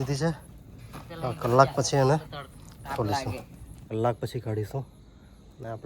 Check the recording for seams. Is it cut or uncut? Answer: cut